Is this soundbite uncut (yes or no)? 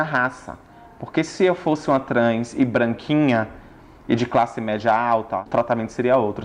no